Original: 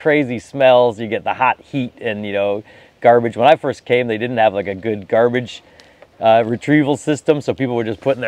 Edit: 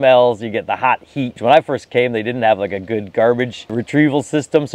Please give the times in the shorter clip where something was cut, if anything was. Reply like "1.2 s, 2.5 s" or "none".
1.4 s, 3.7 s